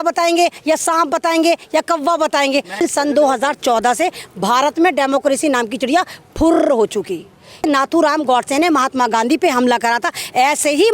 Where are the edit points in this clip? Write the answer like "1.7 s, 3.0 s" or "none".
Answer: 2.8 s, 7.6 s

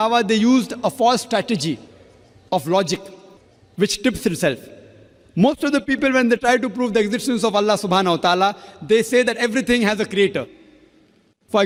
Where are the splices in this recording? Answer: none

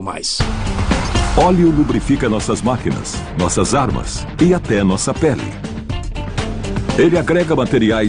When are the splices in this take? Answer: 2.6 s

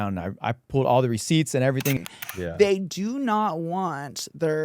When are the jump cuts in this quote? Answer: 2.0 s

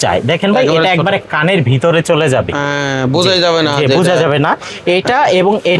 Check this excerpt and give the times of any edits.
none

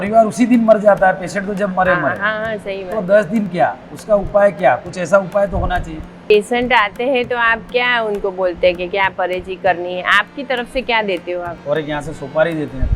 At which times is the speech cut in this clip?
6.3 s, 11.5 s

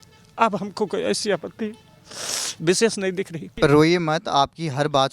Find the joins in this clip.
3.5 s

